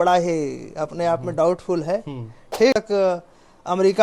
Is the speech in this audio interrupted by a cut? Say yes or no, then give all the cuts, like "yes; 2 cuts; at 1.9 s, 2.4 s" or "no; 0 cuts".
yes; 1 cut; at 2.8 s